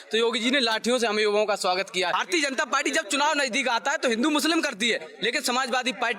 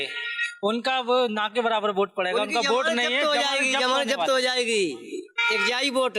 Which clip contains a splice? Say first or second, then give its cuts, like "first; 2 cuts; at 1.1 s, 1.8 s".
first; 1 cut; at 2.2 s